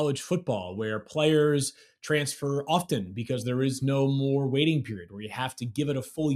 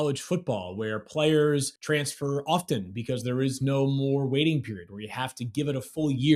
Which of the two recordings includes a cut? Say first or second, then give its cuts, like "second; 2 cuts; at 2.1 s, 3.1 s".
second; 1 cut; at 1.7 s